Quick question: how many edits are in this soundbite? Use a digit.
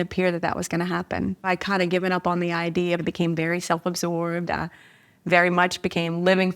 2